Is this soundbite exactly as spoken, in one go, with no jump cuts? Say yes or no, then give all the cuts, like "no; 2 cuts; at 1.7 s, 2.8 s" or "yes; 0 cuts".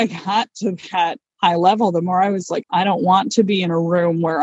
no; 2 cuts; at 1.2 s, 2.6 s